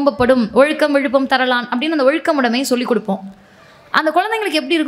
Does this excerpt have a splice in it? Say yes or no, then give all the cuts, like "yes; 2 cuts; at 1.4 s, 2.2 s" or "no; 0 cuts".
no; 0 cuts